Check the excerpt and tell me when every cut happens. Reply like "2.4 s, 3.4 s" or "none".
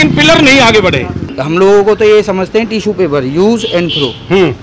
1.3 s

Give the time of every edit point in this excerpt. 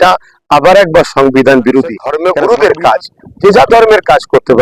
2.1 s

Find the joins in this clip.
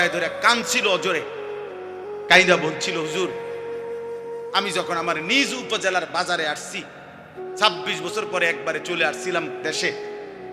none

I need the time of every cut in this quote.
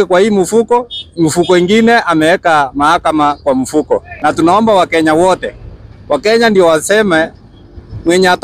4.1 s

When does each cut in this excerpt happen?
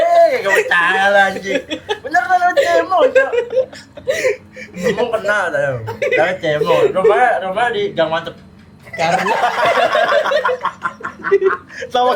none

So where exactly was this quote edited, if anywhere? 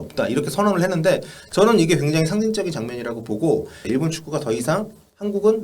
3.8 s

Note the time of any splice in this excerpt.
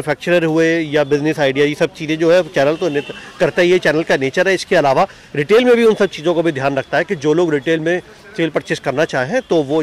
none

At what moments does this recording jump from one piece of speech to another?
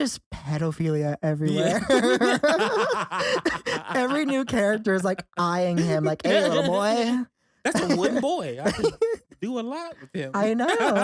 none

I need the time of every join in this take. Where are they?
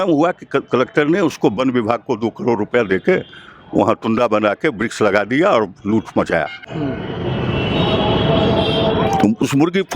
6.6 s

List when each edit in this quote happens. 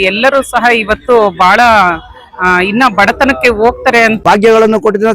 4.2 s

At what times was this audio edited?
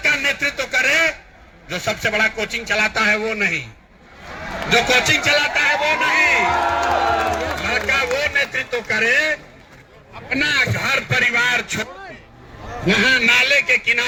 none

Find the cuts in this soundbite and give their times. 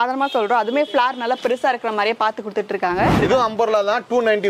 3.2 s

